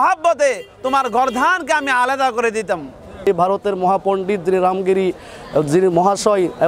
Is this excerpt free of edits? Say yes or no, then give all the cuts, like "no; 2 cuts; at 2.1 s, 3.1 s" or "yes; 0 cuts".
no; 1 cut; at 3.3 s